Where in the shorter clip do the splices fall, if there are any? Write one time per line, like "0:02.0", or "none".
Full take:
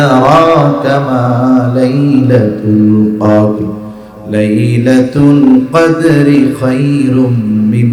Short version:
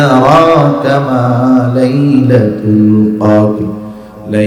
none